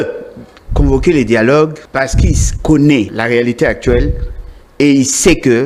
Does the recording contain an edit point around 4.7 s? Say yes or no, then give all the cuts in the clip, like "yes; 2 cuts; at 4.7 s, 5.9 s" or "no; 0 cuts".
no; 2 cuts; at 1.8 s, 3.1 s